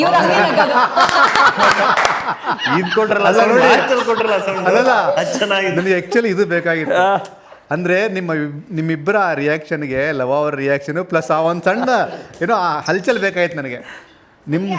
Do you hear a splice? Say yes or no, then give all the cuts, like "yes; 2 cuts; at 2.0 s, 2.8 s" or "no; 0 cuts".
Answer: no; 0 cuts